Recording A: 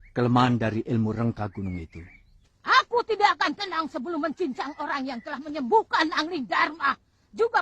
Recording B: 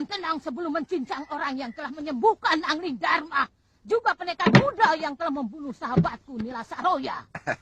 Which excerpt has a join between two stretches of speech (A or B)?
A